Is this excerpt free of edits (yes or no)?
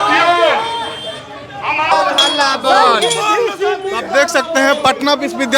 no